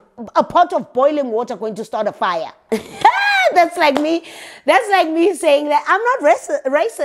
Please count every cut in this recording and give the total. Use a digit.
1